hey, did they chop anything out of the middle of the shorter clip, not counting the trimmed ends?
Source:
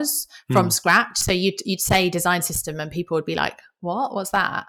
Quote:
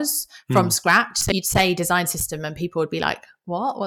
yes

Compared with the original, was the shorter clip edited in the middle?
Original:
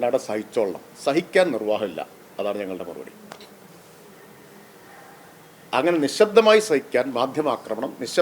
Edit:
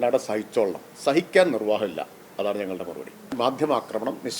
yes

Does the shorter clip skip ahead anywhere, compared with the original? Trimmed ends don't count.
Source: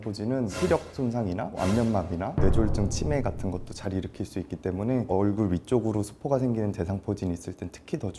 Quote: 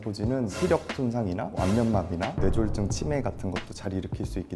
no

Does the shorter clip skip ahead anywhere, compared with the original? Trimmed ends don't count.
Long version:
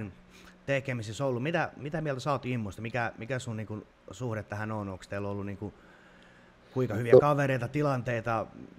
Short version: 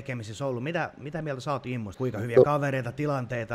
yes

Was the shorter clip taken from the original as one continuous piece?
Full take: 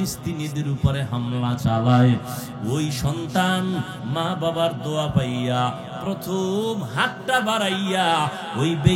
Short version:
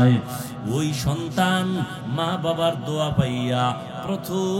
yes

